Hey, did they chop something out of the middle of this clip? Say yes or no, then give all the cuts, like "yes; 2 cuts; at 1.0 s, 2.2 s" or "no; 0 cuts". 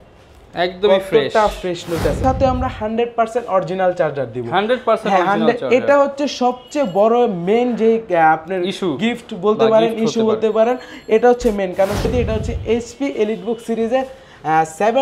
yes; 2 cuts; at 2.2 s, 12.1 s